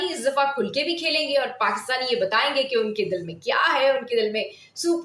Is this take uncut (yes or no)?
yes